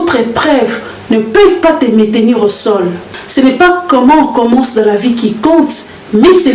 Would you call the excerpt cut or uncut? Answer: cut